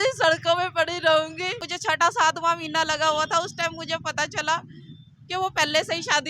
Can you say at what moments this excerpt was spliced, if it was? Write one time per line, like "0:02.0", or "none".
0:01.7